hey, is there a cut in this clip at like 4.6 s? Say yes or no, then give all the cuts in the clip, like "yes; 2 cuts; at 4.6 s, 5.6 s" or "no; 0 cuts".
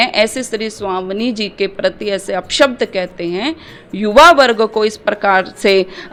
no; 0 cuts